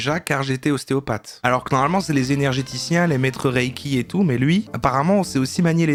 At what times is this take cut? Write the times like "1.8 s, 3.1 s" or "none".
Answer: none

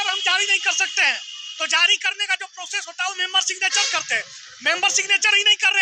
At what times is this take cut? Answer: none

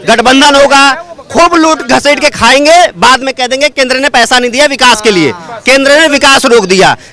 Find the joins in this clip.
none

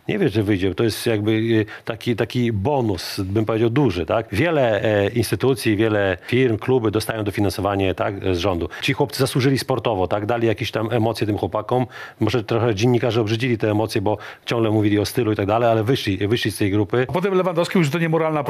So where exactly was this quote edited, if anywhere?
4.3 s, 6.2 s, 8.8 s, 17.1 s

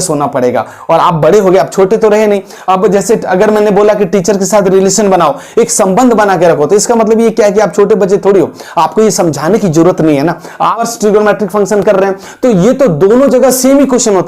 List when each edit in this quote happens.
10.9 s

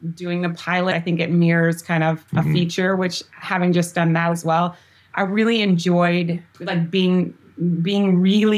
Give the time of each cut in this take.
0.9 s, 2.3 s, 6.6 s

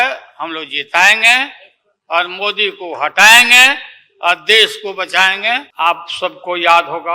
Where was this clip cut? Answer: 5.7 s

